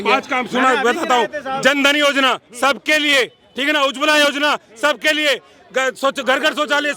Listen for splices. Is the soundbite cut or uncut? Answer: uncut